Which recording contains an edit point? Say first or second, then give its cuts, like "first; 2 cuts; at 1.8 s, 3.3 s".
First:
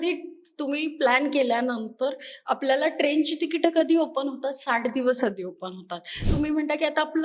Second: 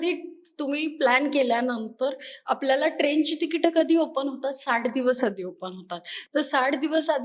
first; 1 cut; at 6.3 s